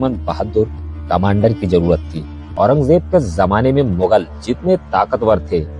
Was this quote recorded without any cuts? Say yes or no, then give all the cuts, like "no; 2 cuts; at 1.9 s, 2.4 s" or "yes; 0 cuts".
no; 1 cut; at 2.4 s